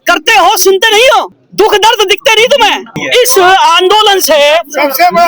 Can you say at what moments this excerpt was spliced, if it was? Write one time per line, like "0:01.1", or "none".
0:03.0

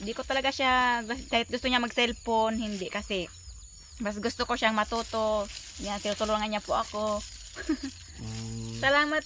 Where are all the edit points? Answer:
none

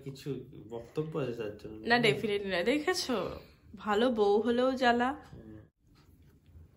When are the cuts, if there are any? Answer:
0:05.6

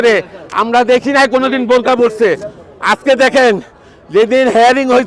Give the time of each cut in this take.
none

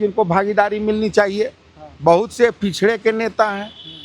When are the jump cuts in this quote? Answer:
none

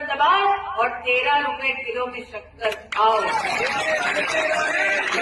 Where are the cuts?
none

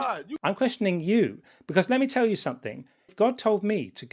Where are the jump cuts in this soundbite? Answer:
0:03.0

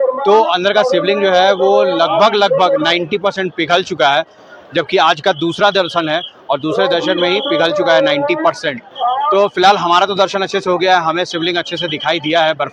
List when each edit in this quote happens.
none

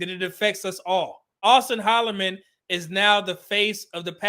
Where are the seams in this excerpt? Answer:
0:01.4

